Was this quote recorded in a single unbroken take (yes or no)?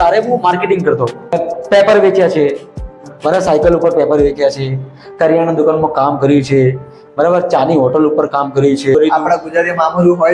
no